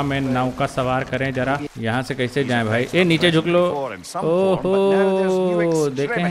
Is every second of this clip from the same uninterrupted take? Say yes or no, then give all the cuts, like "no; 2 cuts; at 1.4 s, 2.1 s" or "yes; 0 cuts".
no; 1 cut; at 1.7 s